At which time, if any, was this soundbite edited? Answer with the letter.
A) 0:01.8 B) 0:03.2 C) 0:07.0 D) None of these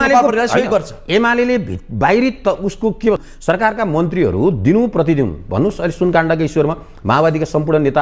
B